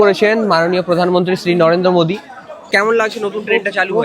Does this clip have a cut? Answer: yes; 1 cut; at 2.7 s

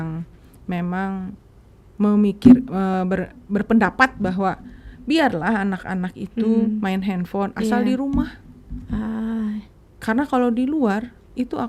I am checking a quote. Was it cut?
no; 0 cuts

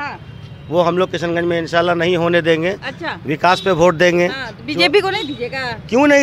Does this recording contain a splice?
no; 0 cuts

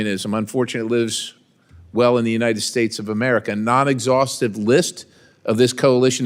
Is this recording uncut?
yes; 0 cuts

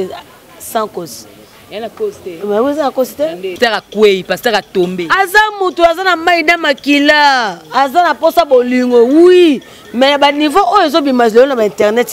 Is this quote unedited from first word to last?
no; 1 cut; at 3.5 s

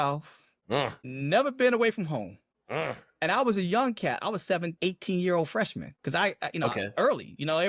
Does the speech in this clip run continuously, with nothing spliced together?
yes; 0 cuts

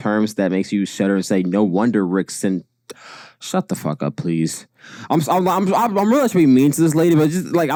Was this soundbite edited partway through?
no; 0 cuts

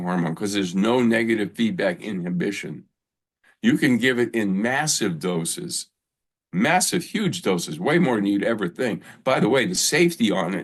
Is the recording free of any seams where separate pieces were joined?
yes; 0 cuts

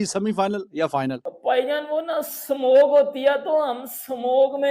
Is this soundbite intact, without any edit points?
no; 1 cut; at 1.3 s

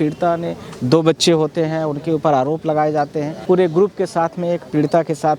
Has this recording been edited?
yes; 1 cut; at 3.3 s

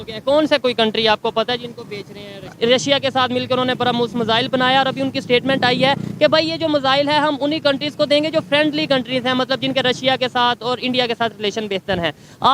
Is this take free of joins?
no; 1 cut; at 2.5 s

